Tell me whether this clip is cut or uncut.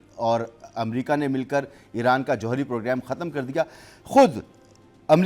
uncut